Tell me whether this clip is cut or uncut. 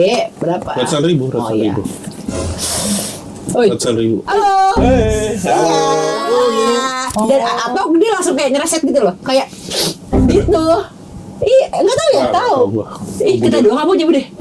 cut